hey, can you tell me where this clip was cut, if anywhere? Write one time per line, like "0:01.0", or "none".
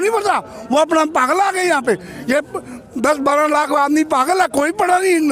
none